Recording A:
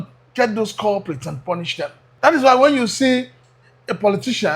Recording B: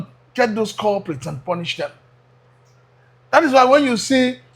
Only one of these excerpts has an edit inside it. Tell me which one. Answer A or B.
A